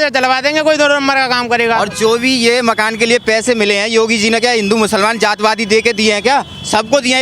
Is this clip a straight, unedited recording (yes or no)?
yes